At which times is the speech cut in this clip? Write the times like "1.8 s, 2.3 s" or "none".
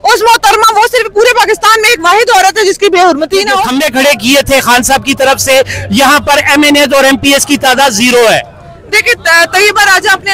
3.7 s